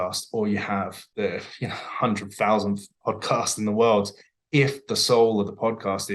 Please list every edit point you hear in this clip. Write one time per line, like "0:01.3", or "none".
0:01.0